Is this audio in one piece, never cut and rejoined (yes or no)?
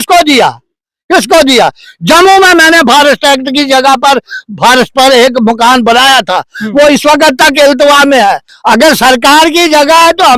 no